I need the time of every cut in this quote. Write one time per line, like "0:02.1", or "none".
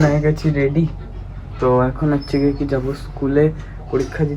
none